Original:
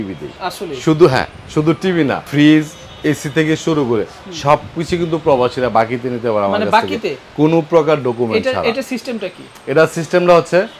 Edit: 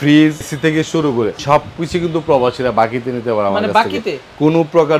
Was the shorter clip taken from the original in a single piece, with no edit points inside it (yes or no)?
no